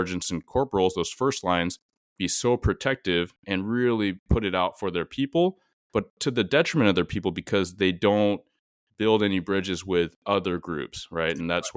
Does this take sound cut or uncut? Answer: uncut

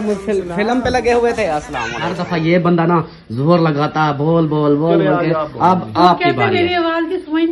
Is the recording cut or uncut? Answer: cut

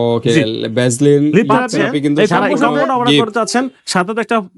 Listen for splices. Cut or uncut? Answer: cut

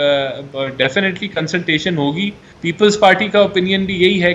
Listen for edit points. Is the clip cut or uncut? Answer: cut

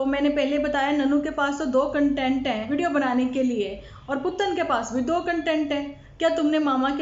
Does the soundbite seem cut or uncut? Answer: cut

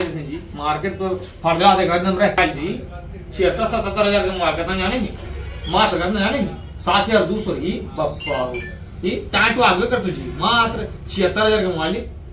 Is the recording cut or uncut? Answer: cut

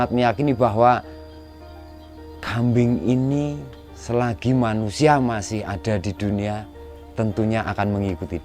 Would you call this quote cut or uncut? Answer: uncut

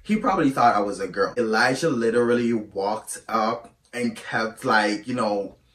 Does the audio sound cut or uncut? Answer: cut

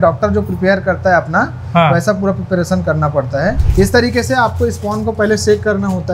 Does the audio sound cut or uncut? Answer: cut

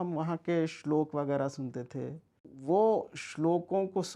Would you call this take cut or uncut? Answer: cut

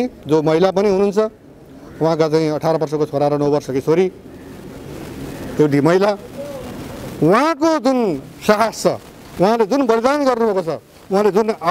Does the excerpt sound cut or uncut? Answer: uncut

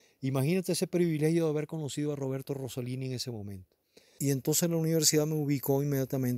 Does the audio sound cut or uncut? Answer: cut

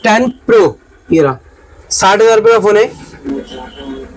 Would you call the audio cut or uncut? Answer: uncut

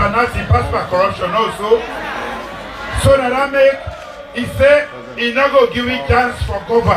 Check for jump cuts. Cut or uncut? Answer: cut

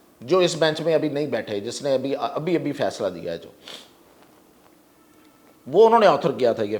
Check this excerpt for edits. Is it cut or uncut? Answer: uncut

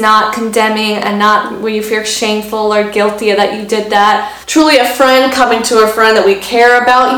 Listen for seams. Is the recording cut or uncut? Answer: cut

